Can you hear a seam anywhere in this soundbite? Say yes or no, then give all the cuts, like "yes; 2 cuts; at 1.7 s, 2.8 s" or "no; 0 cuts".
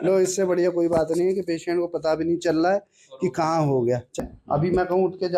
yes; 1 cut; at 4.2 s